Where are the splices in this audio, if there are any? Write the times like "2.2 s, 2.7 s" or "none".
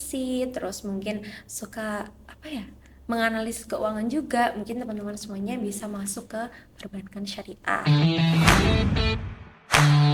7.8 s